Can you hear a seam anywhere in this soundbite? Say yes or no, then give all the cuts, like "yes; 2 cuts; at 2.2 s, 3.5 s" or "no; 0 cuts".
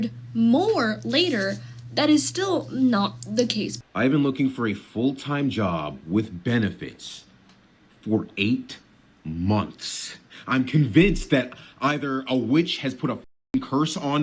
yes; 1 cut; at 3.7 s